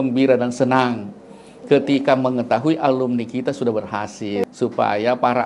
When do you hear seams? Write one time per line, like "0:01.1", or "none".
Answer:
0:04.4